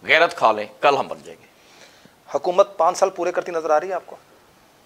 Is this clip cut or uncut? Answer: uncut